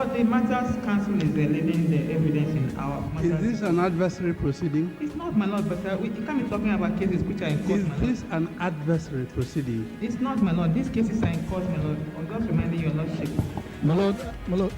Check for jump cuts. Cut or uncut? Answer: cut